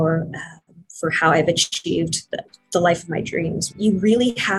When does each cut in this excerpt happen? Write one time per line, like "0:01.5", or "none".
0:03.7